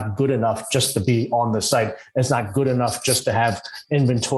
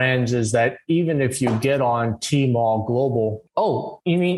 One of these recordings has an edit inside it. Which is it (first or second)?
second